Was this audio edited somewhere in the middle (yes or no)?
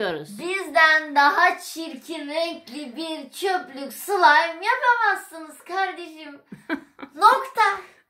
no